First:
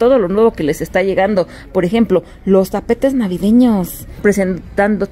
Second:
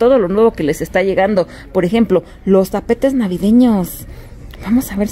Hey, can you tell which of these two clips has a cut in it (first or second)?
first